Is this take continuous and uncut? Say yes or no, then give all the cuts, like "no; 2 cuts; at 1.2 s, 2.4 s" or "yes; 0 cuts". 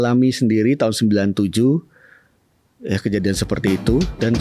yes; 0 cuts